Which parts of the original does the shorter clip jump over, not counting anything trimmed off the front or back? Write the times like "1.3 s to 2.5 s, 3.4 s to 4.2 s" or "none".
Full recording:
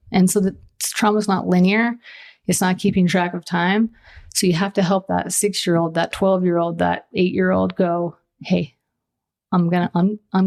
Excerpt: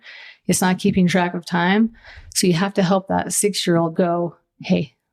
5.9 s to 7.7 s